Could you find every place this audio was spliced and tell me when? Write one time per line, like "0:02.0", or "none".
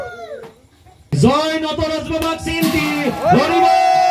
0:01.1